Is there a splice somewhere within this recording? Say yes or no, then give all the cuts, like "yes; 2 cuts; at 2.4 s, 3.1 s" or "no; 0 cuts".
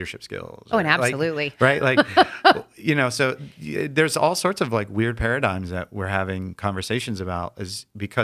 no; 0 cuts